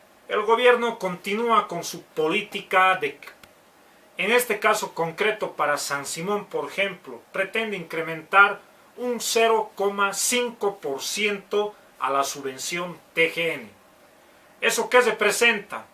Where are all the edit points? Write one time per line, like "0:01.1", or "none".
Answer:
none